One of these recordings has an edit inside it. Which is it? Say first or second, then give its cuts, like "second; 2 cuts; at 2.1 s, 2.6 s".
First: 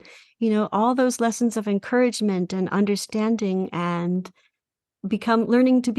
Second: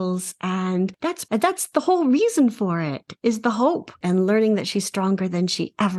second; 3 cuts; at 1.2 s, 3.0 s, 4.0 s